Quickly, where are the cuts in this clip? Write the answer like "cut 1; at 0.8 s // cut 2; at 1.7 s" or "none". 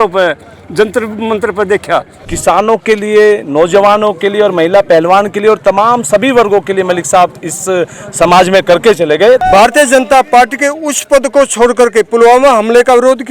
cut 1; at 2.3 s // cut 2; at 9.4 s